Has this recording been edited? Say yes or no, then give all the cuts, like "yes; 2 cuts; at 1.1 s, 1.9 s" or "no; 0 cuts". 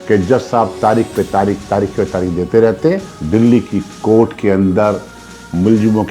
yes; 1 cut; at 3.1 s